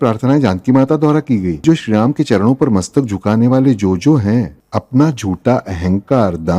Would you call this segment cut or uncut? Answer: cut